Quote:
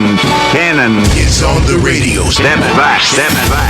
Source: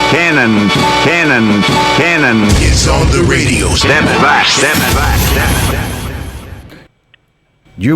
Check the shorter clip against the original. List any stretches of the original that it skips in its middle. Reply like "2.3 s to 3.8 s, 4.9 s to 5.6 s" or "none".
1.5 s to 2.4 s